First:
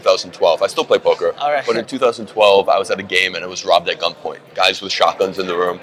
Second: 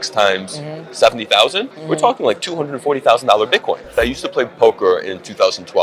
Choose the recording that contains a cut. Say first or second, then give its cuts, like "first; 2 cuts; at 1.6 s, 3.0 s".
second; 1 cut; at 4.0 s